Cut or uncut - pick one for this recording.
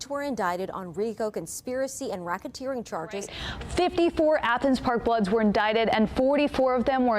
cut